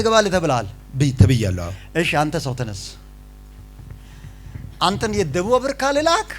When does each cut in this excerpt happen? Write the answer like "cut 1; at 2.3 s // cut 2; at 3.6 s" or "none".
none